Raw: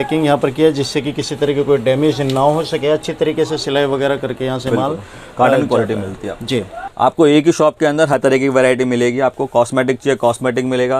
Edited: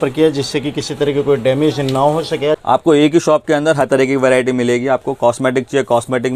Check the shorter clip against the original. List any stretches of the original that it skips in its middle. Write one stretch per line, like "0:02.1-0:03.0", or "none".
0:03.0-0:06.9